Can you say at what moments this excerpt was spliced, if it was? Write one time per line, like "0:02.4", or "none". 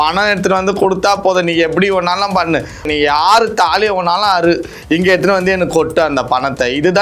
0:02.8